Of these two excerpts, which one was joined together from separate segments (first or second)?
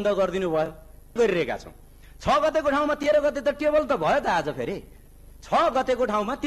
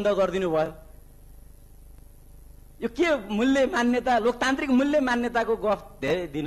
first